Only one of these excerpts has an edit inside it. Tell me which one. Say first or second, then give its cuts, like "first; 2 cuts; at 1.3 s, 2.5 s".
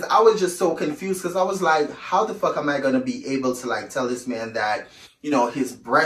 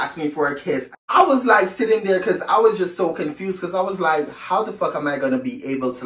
second; 1 cut; at 1.0 s